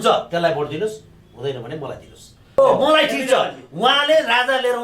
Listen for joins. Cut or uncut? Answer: cut